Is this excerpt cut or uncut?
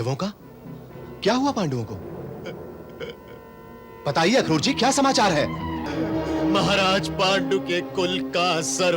cut